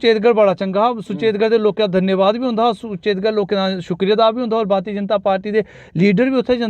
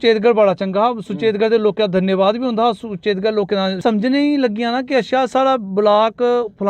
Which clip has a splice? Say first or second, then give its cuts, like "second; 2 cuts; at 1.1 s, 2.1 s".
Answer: second; 1 cut; at 3.8 s